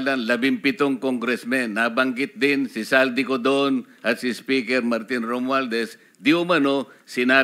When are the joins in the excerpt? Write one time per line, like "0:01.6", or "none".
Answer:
none